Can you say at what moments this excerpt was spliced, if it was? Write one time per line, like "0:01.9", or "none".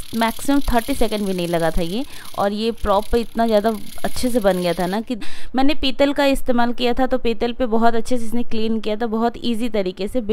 0:05.3